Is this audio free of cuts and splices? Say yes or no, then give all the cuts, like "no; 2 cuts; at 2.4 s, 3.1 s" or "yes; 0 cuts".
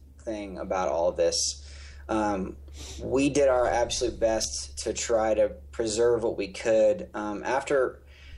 yes; 0 cuts